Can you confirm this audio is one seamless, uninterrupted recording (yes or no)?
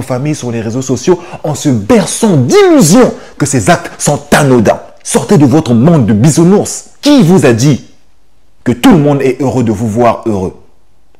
no